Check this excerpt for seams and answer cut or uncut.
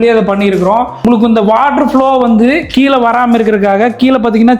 cut